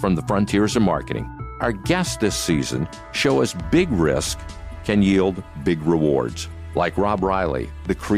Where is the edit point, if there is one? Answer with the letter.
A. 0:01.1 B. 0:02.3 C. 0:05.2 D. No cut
A